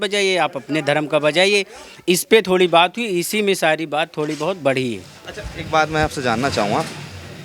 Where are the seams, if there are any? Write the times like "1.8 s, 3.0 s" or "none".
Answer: none